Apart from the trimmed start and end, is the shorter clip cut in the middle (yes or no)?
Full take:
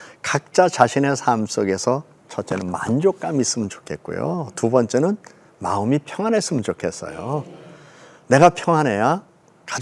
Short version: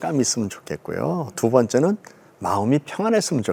no